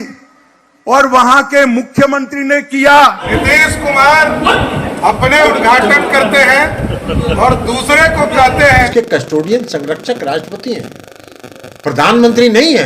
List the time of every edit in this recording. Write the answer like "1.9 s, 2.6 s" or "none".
3.3 s, 8.9 s

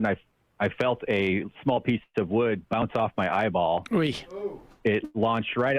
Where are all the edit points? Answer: none

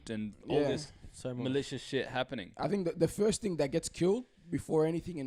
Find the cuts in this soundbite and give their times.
none

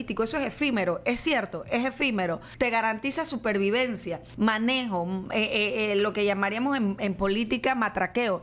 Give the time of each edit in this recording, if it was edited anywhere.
2.5 s, 4.2 s

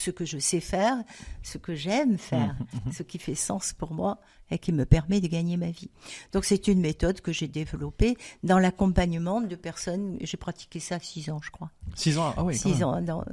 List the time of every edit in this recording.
none

